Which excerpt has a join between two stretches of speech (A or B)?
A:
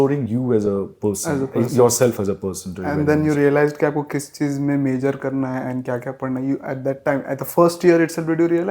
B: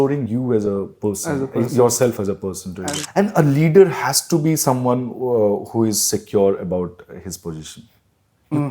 B